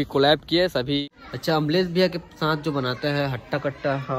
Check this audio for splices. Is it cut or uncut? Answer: cut